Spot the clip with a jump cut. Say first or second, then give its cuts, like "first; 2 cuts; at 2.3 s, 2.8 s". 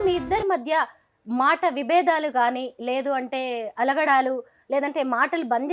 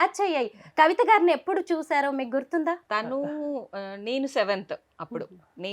second; 1 cut; at 2.8 s